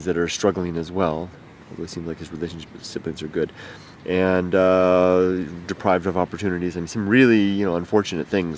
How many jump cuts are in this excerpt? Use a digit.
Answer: 1